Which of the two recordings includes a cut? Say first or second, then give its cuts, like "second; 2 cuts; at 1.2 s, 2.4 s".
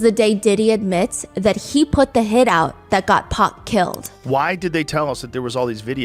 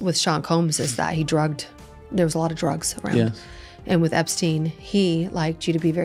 first; 1 cut; at 4.1 s